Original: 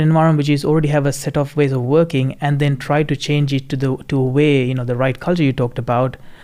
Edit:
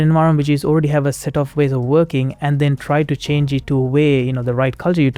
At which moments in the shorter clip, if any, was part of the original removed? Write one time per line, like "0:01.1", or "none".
0:03.6